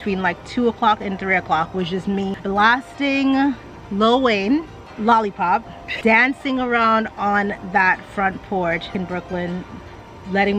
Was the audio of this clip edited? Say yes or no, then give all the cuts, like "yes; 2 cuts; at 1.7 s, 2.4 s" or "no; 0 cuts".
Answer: yes; 3 cuts; at 2.4 s, 5.8 s, 8.9 s